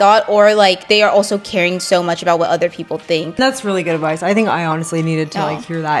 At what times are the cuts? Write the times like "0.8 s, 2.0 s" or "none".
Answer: 0.8 s, 3.4 s